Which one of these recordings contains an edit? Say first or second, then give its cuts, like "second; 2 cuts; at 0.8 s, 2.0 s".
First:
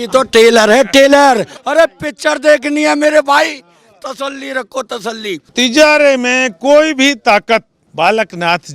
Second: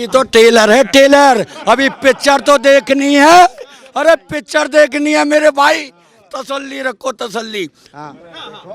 first; 3 cuts; at 1.5 s, 5.5 s, 7.8 s